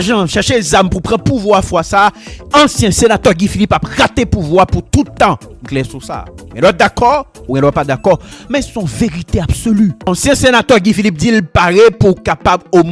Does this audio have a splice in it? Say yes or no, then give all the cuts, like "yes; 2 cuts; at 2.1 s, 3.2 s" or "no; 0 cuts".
yes; 1 cut; at 10.1 s